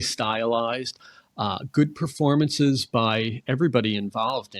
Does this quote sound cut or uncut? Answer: uncut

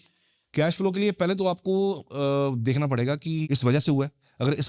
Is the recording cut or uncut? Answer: cut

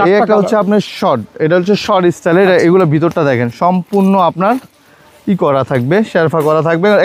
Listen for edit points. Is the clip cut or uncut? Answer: uncut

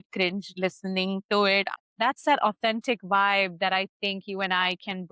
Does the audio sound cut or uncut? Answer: cut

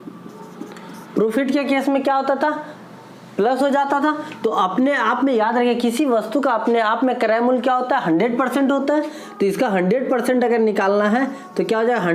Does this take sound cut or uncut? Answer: uncut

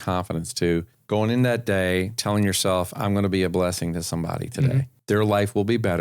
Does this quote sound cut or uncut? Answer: cut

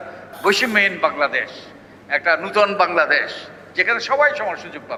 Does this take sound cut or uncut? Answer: uncut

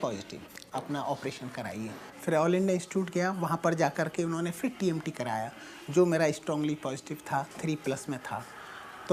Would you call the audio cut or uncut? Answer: uncut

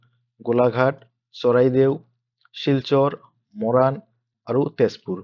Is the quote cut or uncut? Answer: cut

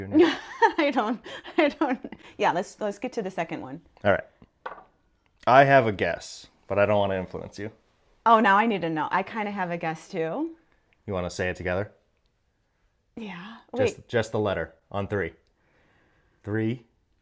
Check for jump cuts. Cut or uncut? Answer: uncut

